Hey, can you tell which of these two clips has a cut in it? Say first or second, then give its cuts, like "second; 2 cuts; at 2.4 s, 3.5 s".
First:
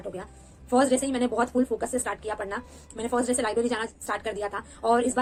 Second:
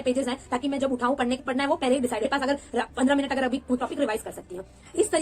second; 3 cuts; at 1.4 s, 2.2 s, 3.8 s